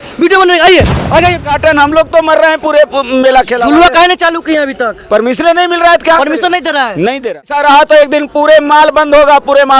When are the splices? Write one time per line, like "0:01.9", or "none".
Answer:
0:01.4
0:07.5